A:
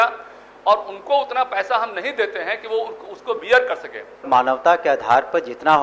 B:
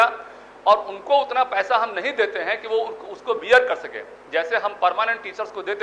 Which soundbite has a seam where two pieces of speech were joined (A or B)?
A